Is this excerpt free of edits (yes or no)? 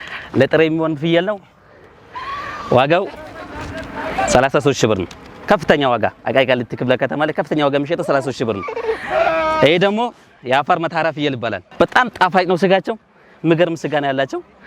no